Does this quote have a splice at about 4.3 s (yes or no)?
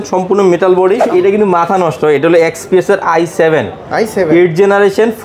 no